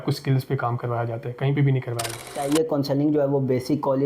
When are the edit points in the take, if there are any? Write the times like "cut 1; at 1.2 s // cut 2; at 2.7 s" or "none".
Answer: cut 1; at 2.4 s